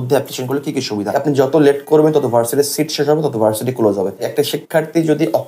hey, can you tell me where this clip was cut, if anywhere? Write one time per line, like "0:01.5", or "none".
0:01.1
0:04.3